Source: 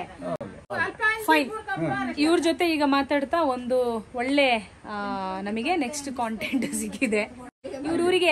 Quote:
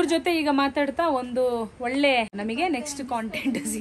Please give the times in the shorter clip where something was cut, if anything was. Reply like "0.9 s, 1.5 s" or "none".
2.3 s